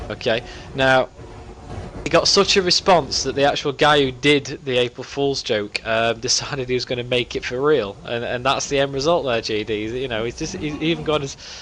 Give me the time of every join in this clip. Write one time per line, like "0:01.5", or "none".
0:07.4